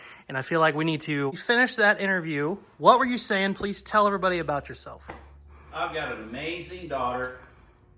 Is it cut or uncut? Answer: uncut